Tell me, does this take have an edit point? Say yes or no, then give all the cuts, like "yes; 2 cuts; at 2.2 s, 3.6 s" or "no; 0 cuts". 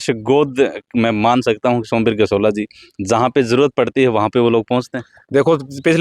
no; 0 cuts